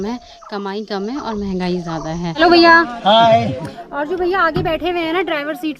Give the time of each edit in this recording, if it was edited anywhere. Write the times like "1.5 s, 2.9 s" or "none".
2.4 s